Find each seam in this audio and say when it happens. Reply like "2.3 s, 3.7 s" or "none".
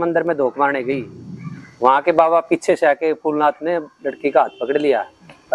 none